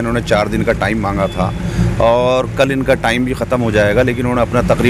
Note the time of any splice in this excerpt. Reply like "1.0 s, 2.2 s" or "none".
none